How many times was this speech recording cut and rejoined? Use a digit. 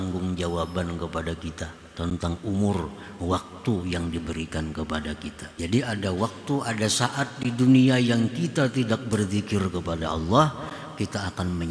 1